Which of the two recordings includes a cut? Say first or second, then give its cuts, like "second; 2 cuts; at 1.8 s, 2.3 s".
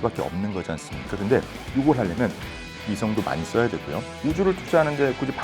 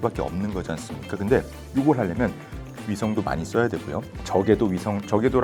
first; 1 cut; at 4.1 s